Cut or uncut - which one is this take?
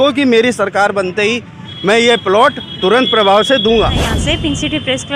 cut